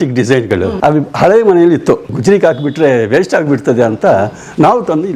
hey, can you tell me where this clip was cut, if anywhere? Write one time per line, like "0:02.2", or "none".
0:00.7
0:02.1

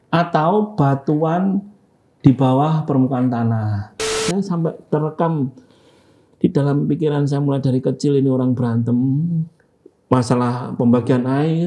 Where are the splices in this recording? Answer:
0:04.2

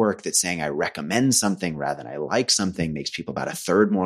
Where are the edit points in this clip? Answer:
none

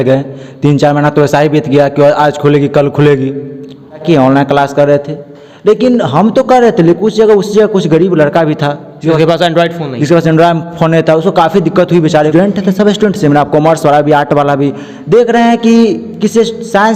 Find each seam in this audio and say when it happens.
0:04.0
0:12.3

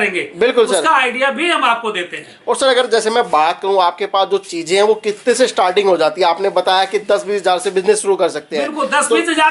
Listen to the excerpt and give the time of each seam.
none

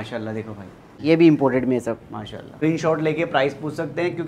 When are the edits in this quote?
0:01.0
0:02.6

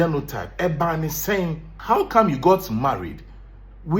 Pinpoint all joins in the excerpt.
0:01.7

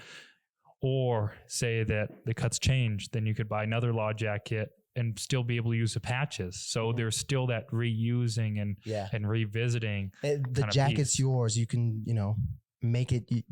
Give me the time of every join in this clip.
none

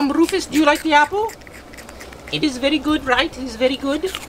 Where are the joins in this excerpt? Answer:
none

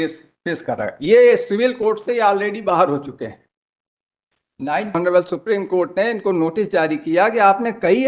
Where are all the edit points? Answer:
0:04.9

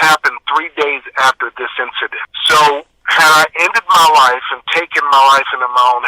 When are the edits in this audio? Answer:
none

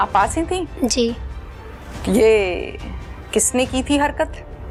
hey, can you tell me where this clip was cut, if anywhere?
none

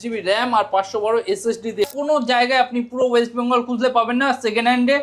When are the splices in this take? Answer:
0:01.9

